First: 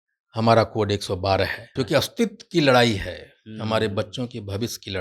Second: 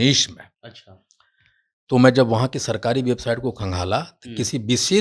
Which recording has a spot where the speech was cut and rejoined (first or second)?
first